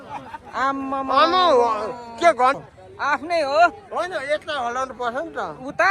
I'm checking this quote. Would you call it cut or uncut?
cut